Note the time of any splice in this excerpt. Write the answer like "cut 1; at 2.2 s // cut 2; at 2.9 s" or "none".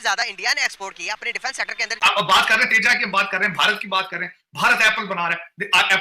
cut 1; at 2.0 s